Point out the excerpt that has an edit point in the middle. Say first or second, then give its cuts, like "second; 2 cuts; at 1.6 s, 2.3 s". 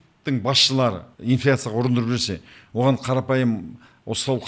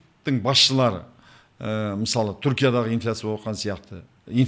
first; 1 cut; at 1.1 s